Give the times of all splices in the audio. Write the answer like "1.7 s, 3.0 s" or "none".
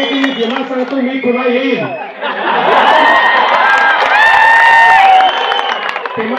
none